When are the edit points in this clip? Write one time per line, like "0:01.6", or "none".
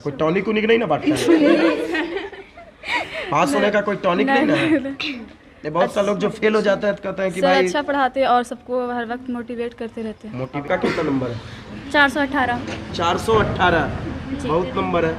0:10.6